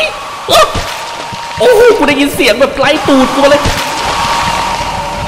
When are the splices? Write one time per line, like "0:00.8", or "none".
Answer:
0:04.2